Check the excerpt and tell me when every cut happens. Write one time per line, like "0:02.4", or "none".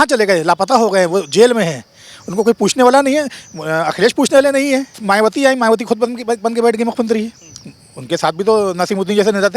0:04.9